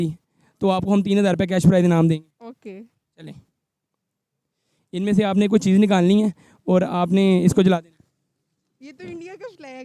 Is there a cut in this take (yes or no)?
no